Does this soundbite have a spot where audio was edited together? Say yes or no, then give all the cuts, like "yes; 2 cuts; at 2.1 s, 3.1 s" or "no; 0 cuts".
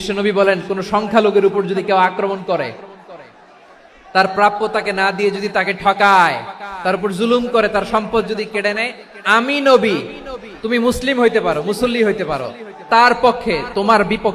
no; 0 cuts